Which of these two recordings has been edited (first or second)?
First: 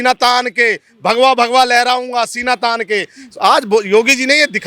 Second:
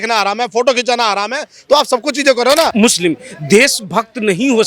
second